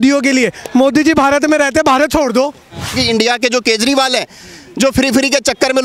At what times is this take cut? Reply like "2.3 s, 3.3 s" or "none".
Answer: 3.0 s